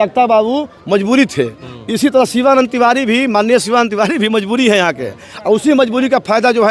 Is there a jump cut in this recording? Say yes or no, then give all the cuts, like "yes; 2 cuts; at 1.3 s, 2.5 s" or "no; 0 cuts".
no; 0 cuts